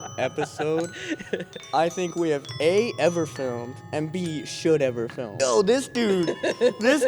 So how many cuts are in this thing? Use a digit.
1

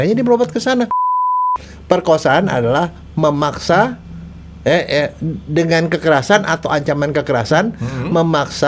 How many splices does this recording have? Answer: 1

